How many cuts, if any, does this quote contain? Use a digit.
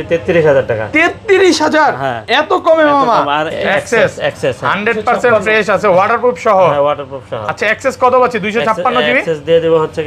1